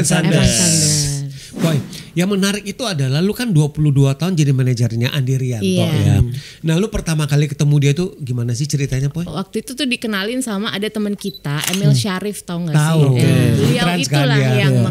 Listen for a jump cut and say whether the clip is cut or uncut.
cut